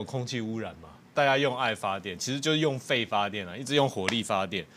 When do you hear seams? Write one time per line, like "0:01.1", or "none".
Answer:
0:01.1